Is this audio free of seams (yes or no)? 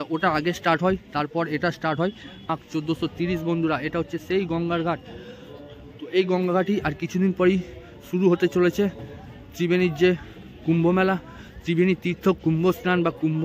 no